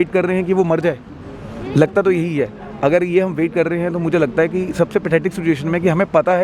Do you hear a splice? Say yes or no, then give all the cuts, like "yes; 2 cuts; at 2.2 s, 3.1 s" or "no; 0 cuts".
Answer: no; 0 cuts